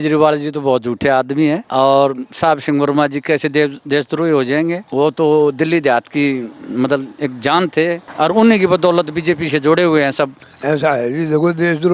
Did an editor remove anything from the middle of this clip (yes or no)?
yes